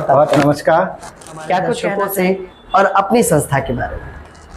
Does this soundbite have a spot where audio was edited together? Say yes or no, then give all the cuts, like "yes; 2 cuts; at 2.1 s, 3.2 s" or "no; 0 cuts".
yes; 1 cut; at 2.0 s